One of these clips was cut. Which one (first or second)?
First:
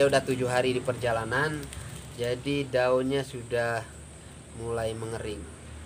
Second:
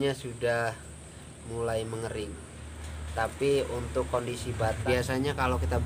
second